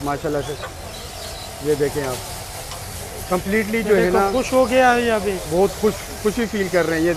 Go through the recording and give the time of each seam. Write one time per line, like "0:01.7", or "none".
none